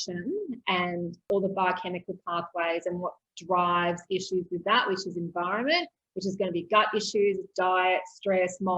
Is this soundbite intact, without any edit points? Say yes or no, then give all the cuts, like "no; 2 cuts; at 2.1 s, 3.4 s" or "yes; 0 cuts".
no; 1 cut; at 1.2 s